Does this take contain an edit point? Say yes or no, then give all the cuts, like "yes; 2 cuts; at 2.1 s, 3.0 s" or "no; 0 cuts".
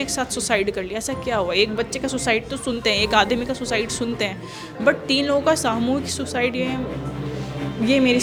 no; 0 cuts